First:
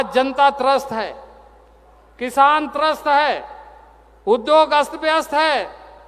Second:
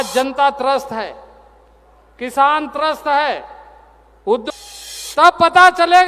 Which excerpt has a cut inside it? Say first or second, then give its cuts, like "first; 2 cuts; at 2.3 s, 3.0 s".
second; 1 cut; at 4.5 s